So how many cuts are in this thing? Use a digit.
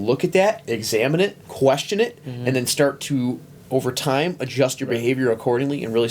2